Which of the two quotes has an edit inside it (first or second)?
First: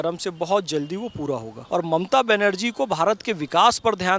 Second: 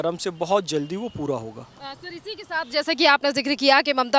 first